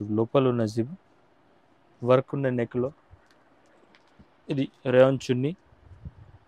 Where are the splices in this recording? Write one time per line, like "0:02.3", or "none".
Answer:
none